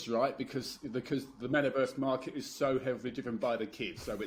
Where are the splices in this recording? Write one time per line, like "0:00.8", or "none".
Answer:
none